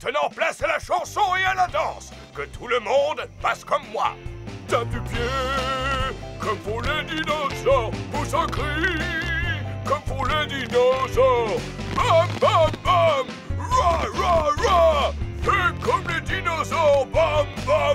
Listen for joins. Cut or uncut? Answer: uncut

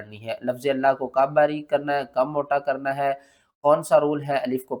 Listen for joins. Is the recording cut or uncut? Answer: uncut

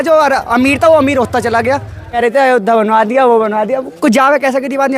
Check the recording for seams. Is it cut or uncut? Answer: cut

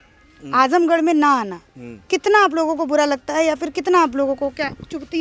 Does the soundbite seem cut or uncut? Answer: uncut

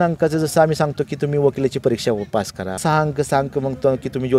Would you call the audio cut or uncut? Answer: cut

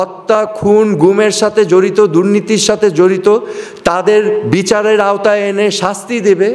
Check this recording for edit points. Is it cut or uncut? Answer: uncut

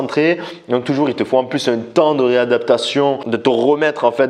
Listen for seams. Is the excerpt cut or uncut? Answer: cut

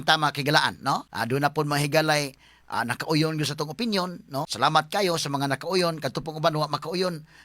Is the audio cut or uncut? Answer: cut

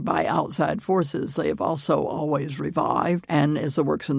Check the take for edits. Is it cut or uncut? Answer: cut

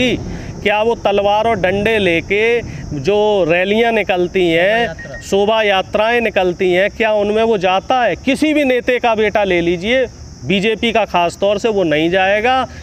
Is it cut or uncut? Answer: uncut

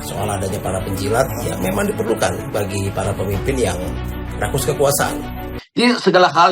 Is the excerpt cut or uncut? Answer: cut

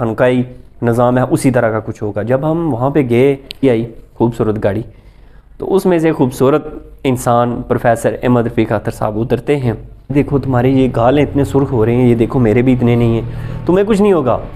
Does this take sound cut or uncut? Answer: cut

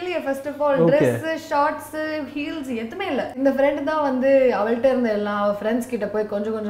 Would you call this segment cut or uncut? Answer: cut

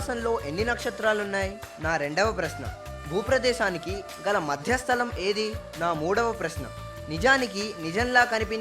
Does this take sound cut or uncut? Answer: cut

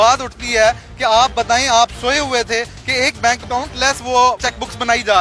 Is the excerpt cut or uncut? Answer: uncut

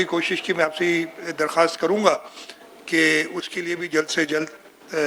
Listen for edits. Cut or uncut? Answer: uncut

